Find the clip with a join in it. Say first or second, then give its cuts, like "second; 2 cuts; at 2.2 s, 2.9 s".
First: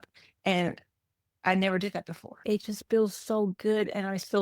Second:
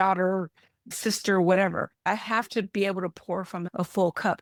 first; 1 cut; at 2.4 s